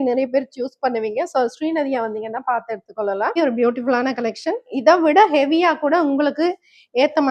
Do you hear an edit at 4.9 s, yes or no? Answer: no